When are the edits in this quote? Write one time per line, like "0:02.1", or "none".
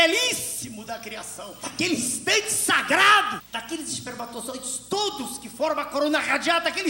0:01.5